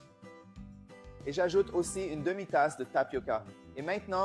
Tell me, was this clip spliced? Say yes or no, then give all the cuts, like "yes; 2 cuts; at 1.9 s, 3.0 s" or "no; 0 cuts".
yes; 1 cut; at 1.2 s